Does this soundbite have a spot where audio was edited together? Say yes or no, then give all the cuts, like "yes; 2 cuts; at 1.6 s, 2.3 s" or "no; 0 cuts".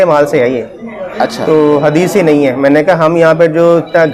no; 0 cuts